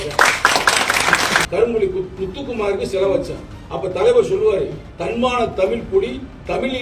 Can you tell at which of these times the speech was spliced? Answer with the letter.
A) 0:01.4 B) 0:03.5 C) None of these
A